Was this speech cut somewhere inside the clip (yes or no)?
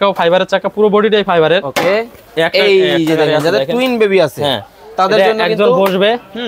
yes